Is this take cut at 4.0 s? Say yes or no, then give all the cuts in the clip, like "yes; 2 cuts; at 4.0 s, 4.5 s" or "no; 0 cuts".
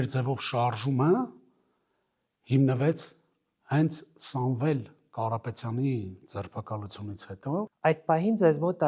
no; 1 cut; at 7.7 s